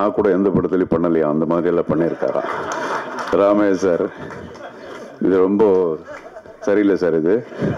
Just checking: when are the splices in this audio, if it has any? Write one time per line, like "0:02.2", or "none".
none